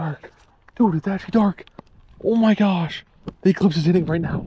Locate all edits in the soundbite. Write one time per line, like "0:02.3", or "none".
none